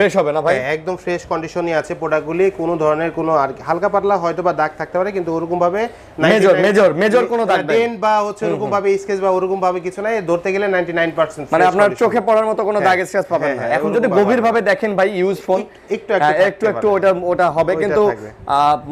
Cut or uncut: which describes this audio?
uncut